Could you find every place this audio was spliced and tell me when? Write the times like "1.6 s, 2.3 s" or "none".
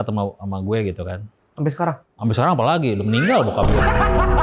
2.1 s